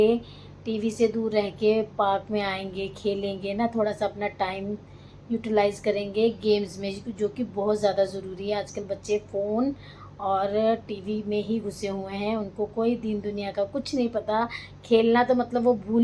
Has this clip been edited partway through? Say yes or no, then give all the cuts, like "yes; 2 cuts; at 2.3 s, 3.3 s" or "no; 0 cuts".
no; 0 cuts